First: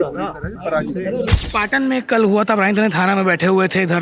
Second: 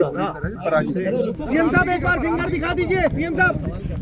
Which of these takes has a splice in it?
first; 1 cut; at 1.4 s

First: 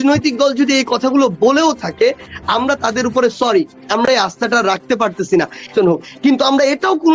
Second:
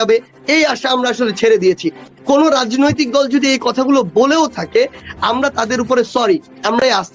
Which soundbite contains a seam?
first; 1 cut; at 5.7 s

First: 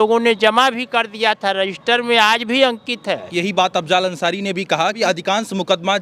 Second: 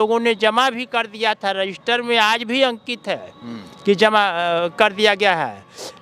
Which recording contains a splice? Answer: first; 2 cuts; at 3.3 s, 5.0 s

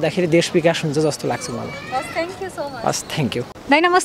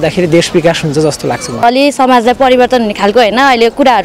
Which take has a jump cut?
second; 1 cut; at 1.6 s

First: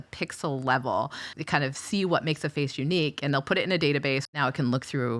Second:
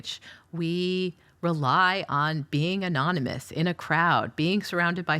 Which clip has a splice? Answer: first; 2 cuts; at 1.3 s, 4.3 s

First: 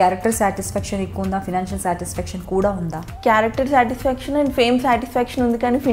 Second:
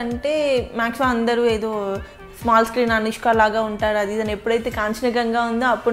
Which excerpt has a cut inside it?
first; 1 cut; at 3.0 s

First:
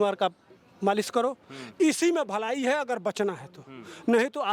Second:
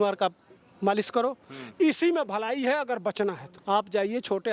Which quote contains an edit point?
second; 1 cut; at 3.5 s

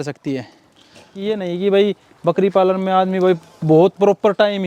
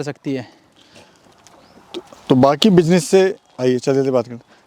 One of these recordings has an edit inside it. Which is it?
first; 1 cut; at 1.1 s

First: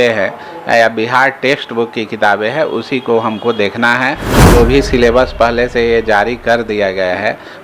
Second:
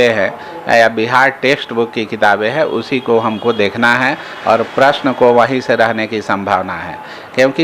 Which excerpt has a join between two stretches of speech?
first; 1 cut; at 4.3 s

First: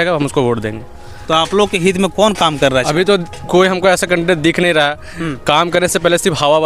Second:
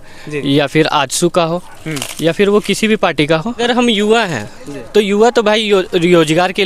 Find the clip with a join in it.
second; 1 cut; at 3.6 s

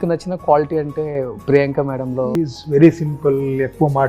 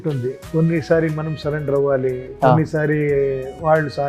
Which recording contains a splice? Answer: first; 1 cut; at 2.3 s

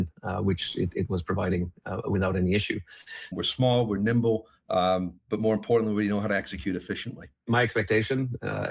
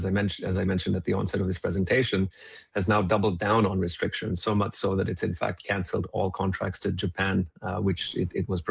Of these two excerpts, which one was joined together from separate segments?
first; 2 cuts; at 3.3 s, 7.4 s

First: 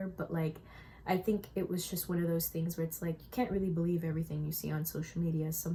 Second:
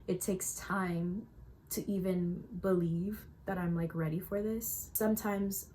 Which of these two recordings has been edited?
second; 1 cut; at 4.8 s

